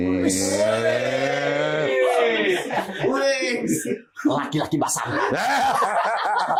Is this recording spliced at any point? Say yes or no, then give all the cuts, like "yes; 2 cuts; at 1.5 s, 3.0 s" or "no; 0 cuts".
no; 0 cuts